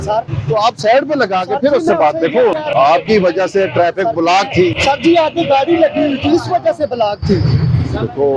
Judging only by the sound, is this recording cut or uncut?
uncut